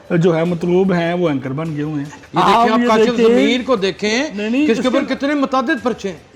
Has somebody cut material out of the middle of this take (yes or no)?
yes